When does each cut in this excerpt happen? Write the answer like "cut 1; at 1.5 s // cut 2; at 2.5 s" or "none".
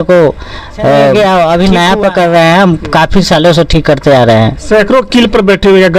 cut 1; at 1.1 s